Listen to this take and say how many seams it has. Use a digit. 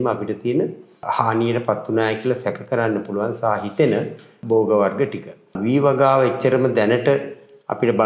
3